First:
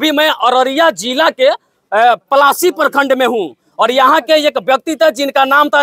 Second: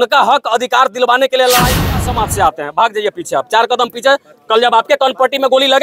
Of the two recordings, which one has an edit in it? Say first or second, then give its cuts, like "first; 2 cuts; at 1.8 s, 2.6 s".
second; 1 cut; at 2.0 s